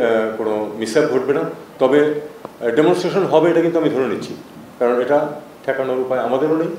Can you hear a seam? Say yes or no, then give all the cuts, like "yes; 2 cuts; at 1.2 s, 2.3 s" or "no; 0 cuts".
no; 0 cuts